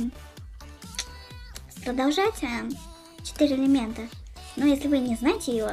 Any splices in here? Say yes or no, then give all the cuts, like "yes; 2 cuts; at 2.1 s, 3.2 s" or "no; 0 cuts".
yes; 1 cut; at 2.3 s